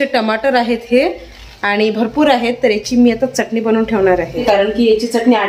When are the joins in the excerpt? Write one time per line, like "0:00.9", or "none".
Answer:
none